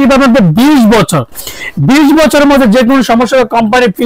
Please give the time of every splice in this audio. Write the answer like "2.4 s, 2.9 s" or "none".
none

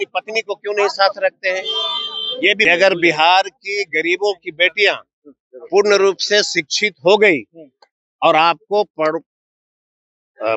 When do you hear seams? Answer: 2.7 s

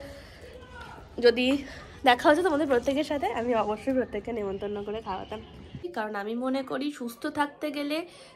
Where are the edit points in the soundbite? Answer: 5.8 s

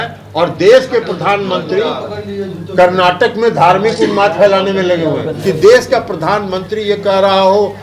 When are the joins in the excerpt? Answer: 5.3 s

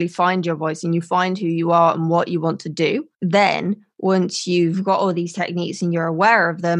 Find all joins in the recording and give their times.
3.1 s

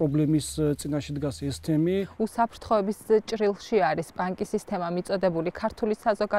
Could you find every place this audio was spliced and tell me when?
2.1 s

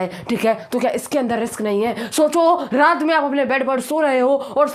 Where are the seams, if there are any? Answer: none

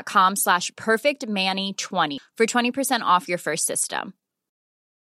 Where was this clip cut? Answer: 2.2 s

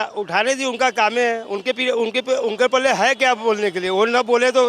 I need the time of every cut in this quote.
none

